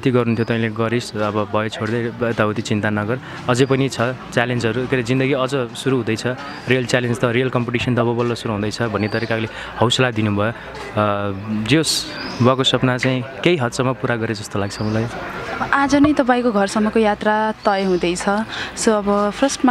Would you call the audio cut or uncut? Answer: uncut